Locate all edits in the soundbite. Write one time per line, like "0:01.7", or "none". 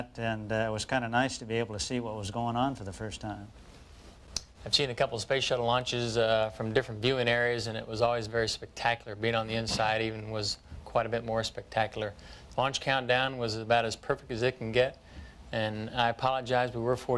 none